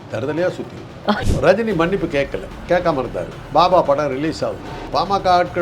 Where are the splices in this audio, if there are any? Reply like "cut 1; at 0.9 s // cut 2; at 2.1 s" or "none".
cut 1; at 1.3 s // cut 2; at 2.5 s // cut 3; at 3.3 s // cut 4; at 4.7 s